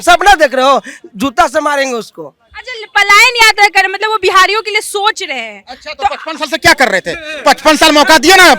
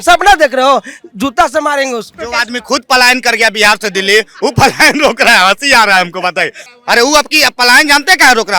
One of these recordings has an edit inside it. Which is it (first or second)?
second